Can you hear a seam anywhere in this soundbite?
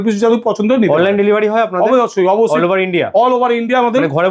no; 0 cuts

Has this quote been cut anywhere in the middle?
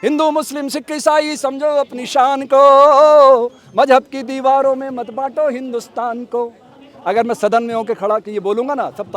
no; 0 cuts

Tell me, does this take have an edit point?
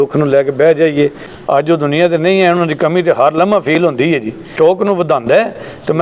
yes; 2 cuts; at 1.3 s, 4.4 s

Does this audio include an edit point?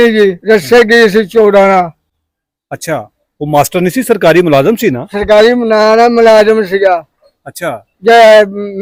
no; 0 cuts

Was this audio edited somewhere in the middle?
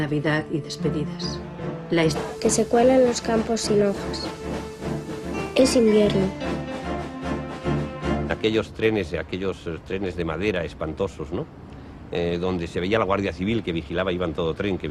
no; 0 cuts

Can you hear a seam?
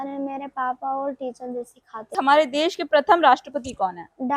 yes; 1 cut; at 2.1 s

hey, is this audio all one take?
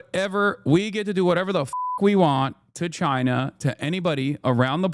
yes; 0 cuts

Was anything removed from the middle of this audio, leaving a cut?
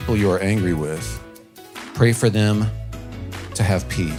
no; 0 cuts

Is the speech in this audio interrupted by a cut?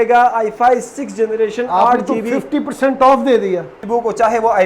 yes; 1 cut; at 3.8 s

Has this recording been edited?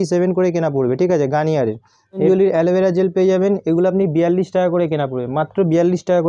no; 0 cuts

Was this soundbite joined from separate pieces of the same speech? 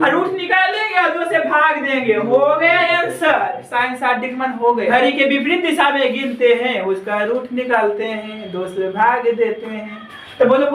yes; 1 cut; at 4.9 s

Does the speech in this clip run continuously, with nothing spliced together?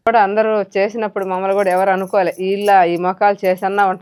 yes; 0 cuts

